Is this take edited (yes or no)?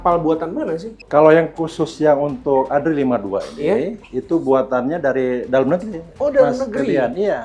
yes